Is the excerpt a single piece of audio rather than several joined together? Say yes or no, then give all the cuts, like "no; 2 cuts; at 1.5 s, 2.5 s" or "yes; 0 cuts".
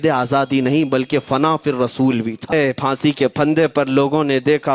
no; 1 cut; at 2.5 s